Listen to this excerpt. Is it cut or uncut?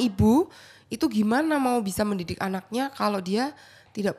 uncut